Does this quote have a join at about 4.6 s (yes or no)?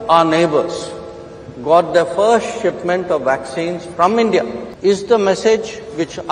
yes